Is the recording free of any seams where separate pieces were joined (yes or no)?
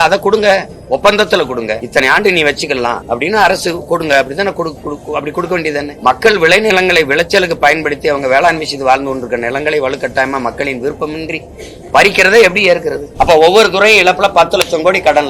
no